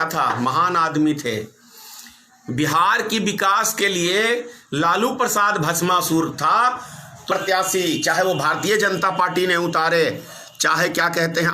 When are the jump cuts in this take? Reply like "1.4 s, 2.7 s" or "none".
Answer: 7.3 s